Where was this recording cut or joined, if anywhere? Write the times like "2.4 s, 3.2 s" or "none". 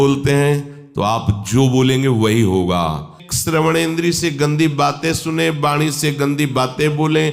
3.2 s

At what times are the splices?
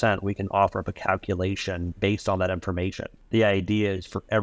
1.9 s, 3.1 s

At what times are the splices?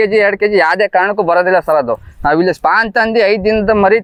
none

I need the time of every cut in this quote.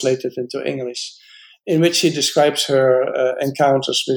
none

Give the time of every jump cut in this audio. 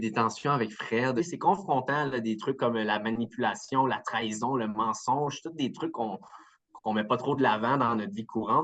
1.2 s

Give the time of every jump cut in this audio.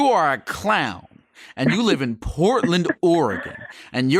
none

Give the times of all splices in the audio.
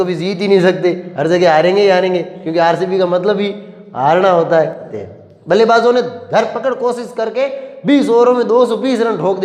4.9 s

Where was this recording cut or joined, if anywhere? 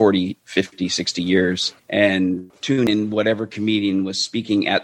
1.7 s, 2.8 s

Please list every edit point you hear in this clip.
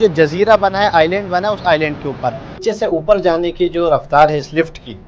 2.6 s

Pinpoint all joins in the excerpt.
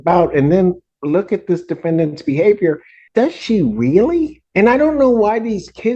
2.9 s, 4.4 s

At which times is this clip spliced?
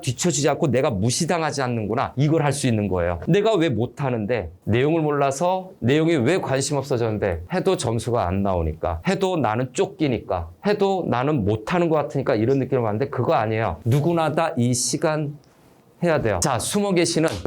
16.4 s

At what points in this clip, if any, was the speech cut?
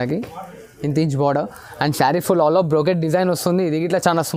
none

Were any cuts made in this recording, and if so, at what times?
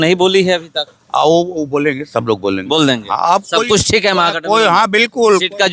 none

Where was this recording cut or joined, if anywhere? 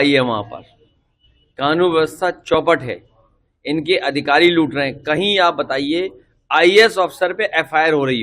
none

